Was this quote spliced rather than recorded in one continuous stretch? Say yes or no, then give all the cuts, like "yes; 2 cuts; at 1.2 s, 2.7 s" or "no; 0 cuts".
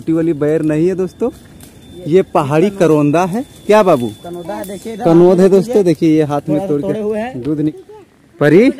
yes; 1 cut; at 7.7 s